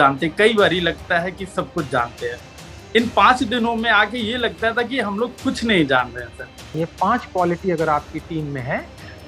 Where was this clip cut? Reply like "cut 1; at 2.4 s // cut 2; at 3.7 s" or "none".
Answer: cut 1; at 6.7 s